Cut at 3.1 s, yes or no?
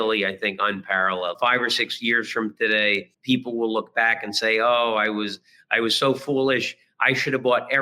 yes